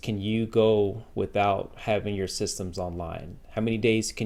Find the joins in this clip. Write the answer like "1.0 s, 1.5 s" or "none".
none